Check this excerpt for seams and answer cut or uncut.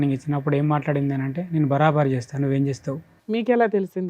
cut